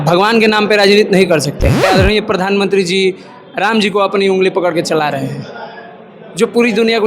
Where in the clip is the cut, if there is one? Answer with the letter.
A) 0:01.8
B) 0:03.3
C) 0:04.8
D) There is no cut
A